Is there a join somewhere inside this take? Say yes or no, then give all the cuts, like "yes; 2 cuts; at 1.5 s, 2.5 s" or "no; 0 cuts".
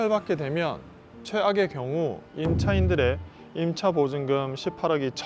no; 0 cuts